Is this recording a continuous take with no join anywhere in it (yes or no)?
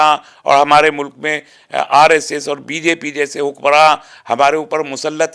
yes